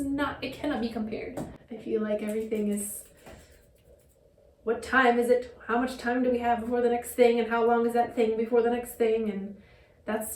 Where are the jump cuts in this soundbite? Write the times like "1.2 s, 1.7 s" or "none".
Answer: 1.6 s